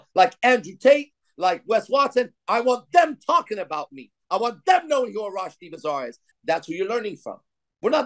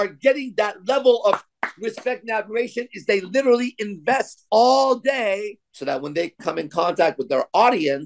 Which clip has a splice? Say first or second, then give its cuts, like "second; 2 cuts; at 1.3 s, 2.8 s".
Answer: second; 1 cut; at 5.6 s